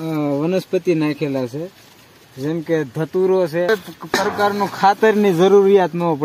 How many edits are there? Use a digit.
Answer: 1